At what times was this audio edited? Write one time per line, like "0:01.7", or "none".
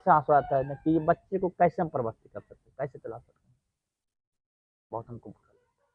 none